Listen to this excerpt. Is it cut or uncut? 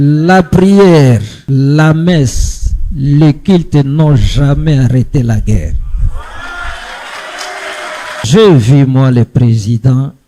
cut